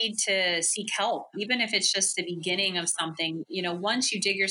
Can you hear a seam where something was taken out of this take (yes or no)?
yes